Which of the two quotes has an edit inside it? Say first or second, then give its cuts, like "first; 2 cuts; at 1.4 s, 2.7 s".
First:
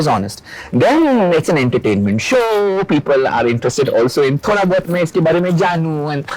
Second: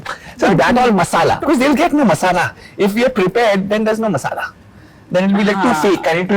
second; 1 cut; at 1.4 s